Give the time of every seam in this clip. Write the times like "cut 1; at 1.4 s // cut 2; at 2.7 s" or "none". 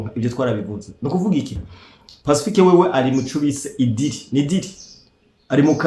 none